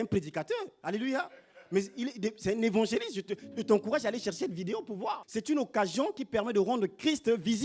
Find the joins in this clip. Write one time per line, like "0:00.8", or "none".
0:05.2